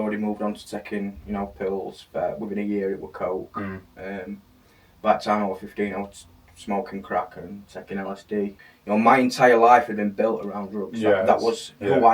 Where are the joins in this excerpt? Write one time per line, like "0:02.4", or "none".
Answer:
0:08.6